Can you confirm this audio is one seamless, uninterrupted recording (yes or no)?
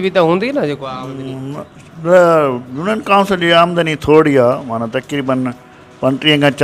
yes